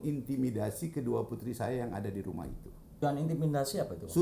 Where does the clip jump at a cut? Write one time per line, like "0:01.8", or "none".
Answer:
0:03.0